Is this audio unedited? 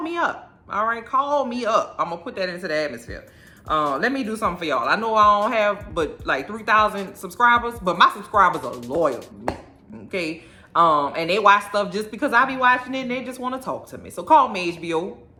yes; 0 cuts

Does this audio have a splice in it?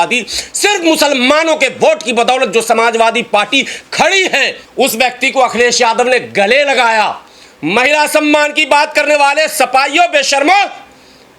yes; 1 cut; at 4.6 s

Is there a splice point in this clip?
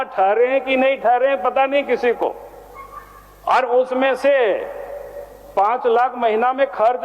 no; 0 cuts

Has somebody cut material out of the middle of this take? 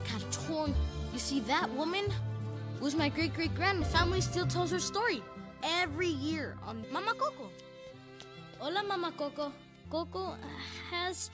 yes; 1 cut; at 9.7 s

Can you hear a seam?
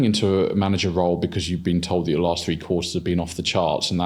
no; 0 cuts

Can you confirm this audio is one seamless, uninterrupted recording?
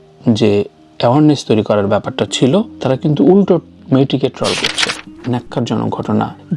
no; 1 cut; at 5.2 s

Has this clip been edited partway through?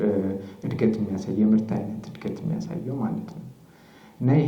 no; 0 cuts

